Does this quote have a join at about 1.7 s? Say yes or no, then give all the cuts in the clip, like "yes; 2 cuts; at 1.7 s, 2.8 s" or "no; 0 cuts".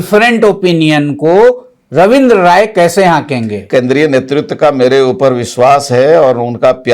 no; 1 cut; at 3.7 s